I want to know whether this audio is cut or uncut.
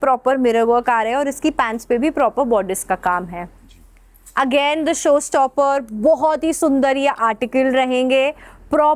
uncut